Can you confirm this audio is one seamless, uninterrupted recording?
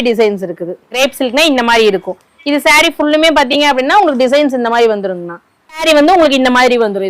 no; 2 cuts; at 0.9 s, 5.8 s

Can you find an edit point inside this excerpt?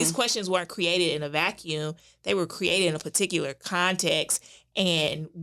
no; 0 cuts

